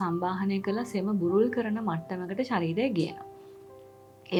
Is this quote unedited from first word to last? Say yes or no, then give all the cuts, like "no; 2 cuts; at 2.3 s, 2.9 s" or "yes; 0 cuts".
yes; 0 cuts